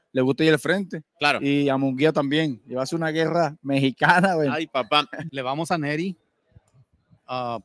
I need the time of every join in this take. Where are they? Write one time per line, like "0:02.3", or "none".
0:05.2